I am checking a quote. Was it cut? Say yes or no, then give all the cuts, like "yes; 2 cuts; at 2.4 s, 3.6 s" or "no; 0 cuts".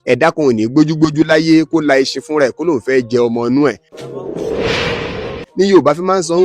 yes; 2 cuts; at 3.9 s, 5.4 s